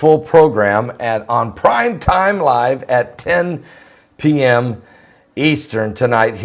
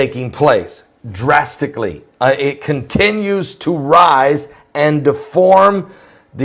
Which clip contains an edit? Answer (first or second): second